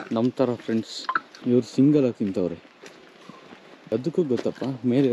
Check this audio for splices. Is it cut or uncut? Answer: cut